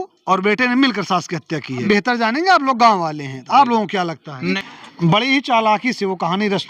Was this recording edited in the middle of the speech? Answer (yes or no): yes